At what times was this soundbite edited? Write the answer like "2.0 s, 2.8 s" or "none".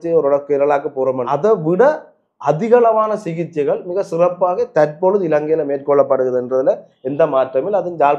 1.2 s